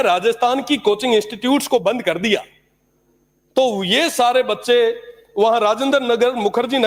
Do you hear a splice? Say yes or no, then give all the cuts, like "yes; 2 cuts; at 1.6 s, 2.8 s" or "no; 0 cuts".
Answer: no; 0 cuts